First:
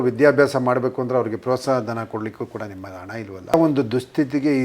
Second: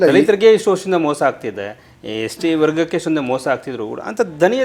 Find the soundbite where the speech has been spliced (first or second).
first